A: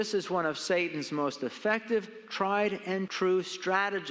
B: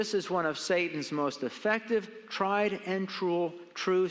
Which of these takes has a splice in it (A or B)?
A